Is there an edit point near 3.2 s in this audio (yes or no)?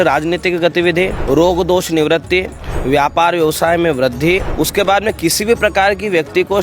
no